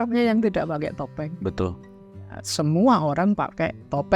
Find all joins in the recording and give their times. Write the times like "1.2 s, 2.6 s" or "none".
none

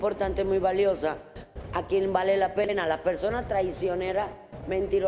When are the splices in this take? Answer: 2.7 s

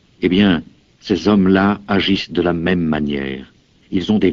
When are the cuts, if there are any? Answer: none

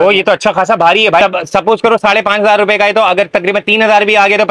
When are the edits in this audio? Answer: 1.2 s

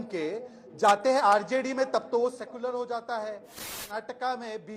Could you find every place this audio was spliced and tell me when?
3.8 s

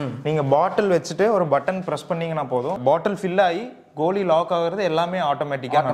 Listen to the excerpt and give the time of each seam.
none

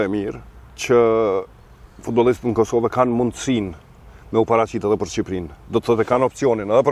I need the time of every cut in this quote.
none

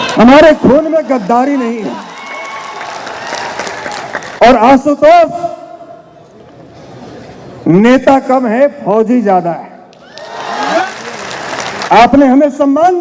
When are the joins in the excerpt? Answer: 10.8 s

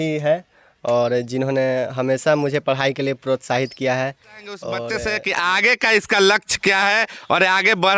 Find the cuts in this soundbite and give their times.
4.9 s

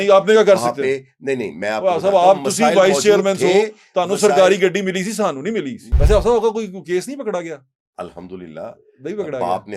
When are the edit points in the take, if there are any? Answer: 5.8 s

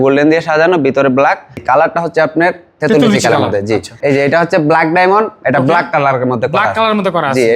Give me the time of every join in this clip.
1.6 s, 3.9 s

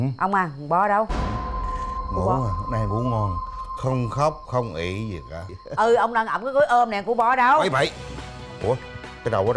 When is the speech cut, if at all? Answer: none

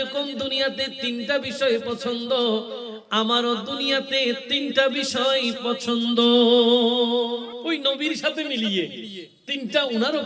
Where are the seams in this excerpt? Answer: 7.5 s

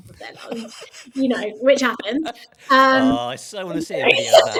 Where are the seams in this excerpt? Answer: none

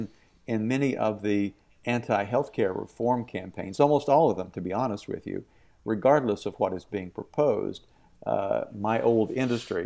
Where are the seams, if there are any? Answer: none

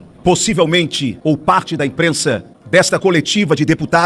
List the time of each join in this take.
1.1 s, 2.5 s

